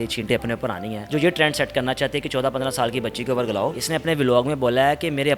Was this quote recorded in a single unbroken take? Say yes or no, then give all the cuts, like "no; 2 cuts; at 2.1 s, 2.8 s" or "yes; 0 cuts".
no; 2 cuts; at 0.9 s, 3.8 s